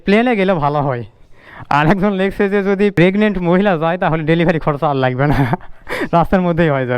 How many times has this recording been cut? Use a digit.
1